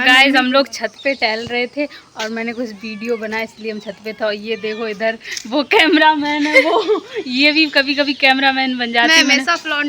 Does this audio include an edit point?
no; 0 cuts

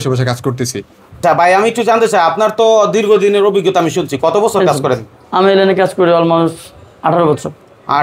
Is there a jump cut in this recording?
yes; 1 cut; at 1.2 s

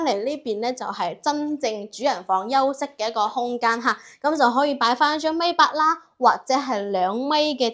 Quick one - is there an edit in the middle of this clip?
no; 0 cuts

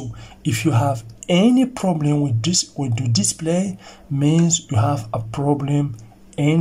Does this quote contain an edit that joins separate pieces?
no; 0 cuts

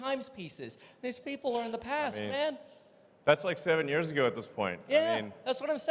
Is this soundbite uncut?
yes; 0 cuts

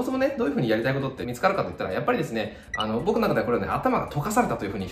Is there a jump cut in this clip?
yes; 1 cut; at 2.6 s

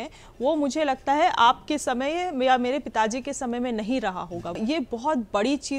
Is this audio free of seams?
no; 1 cut; at 4.6 s

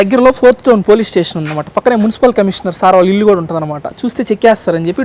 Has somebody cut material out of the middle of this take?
no; 0 cuts

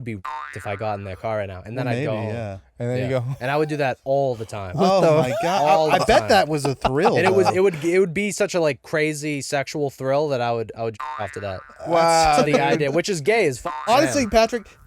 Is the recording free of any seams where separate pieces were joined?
no; 1 cut; at 13.7 s

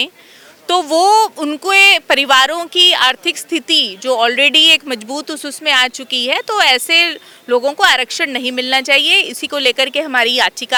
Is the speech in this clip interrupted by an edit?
no; 0 cuts

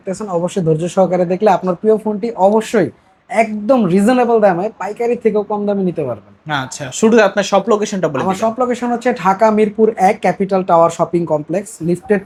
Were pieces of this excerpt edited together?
no; 0 cuts

